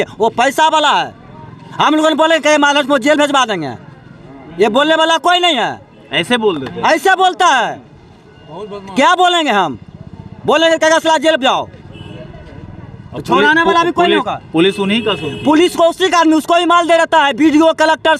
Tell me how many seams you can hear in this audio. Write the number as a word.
zero